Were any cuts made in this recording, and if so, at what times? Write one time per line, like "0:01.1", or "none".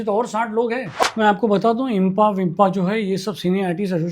0:00.9